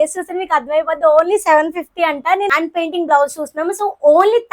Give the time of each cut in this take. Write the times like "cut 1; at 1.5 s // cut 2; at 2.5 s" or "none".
cut 1; at 2.5 s